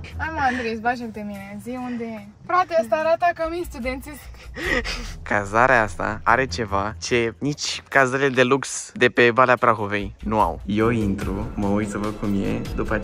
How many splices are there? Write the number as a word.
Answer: two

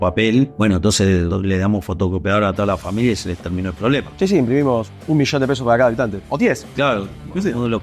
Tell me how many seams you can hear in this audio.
two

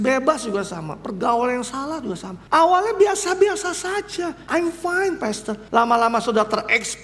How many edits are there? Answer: three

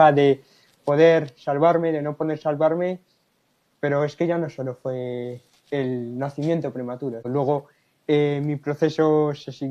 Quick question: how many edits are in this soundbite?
one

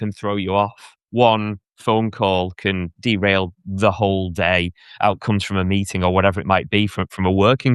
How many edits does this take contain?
two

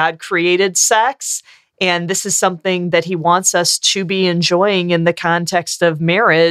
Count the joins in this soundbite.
zero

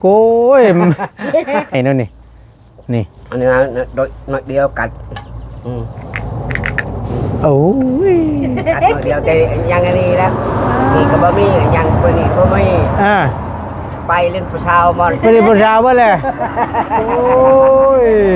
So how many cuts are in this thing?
one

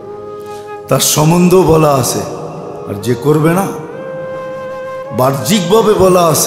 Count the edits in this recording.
two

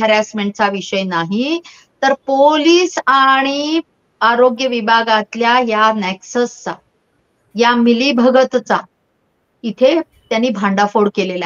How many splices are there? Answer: zero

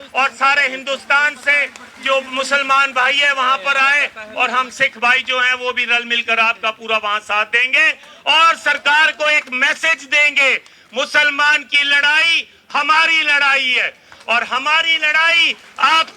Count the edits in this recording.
zero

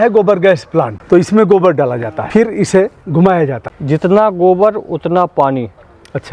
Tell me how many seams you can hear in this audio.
three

